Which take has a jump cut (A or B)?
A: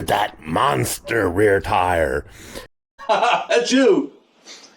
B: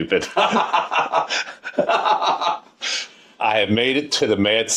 A